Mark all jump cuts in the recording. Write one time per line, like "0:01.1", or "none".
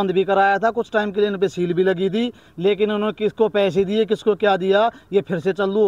none